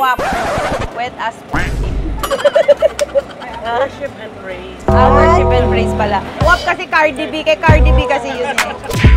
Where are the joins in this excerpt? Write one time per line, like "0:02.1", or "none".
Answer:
none